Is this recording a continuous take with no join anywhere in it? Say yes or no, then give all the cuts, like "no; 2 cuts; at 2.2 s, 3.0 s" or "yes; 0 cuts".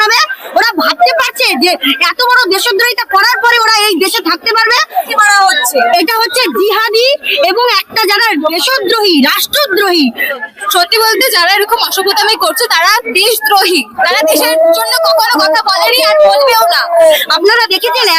no; 3 cuts; at 5.1 s, 10.4 s, 17.3 s